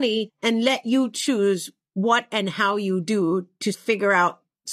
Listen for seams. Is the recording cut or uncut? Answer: uncut